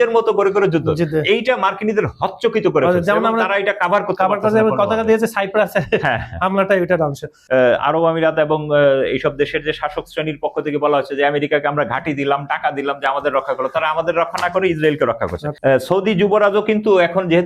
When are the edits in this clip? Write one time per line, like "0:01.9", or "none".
0:07.3
0:15.4